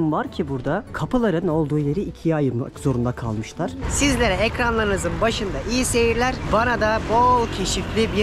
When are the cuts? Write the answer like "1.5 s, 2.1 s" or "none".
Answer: 0.9 s, 3.8 s